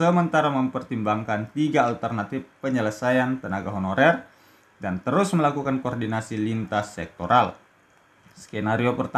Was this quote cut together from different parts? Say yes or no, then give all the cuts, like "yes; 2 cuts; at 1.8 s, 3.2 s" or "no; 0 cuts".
no; 0 cuts